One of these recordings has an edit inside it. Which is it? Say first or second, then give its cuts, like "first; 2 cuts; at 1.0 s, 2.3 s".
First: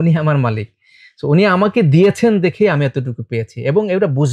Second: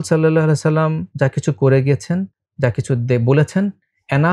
second; 2 cuts; at 1.0 s, 2.4 s